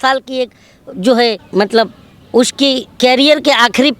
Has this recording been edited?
yes; 2 cuts; at 1.4 s, 2.9 s

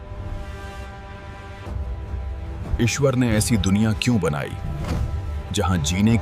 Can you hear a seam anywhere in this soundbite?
yes; 1 cut; at 1.7 s

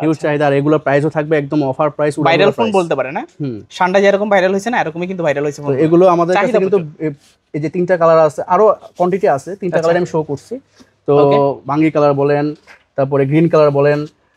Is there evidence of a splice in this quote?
no; 0 cuts

